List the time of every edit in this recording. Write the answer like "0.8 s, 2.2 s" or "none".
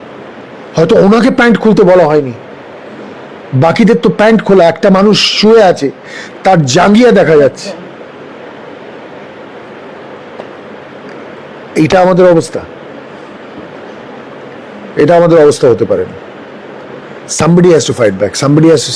none